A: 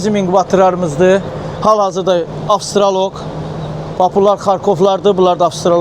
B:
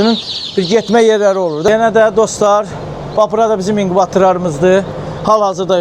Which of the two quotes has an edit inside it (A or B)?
B